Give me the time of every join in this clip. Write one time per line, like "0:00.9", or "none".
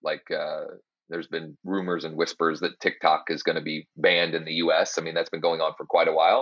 0:01.5

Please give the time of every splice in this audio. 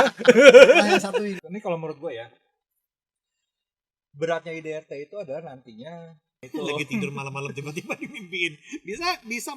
0:01.4
0:06.5

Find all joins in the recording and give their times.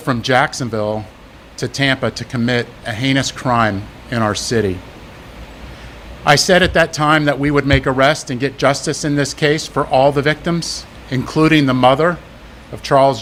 none

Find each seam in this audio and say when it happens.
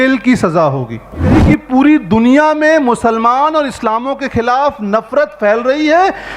0:01.4

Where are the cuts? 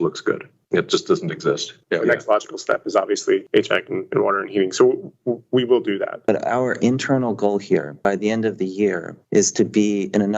0:01.7
0:06.2

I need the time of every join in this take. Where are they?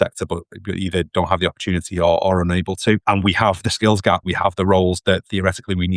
0:03.0
0:04.3

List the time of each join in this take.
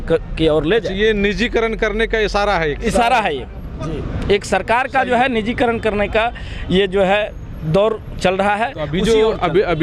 none

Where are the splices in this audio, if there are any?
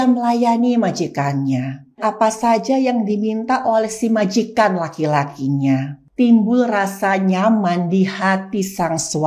0:02.0
0:06.0

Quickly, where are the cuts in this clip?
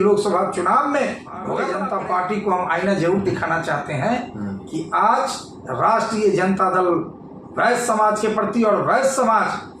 0:01.6

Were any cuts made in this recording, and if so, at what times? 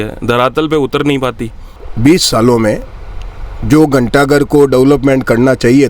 0:01.8

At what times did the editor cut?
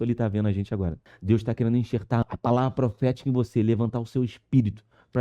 0:01.1
0:02.2

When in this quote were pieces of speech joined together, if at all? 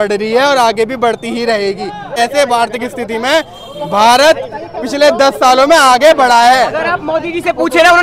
0:02.1

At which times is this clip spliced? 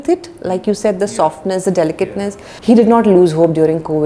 0:02.4

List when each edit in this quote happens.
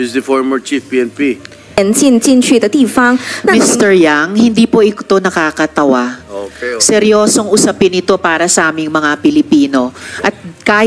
0:01.5

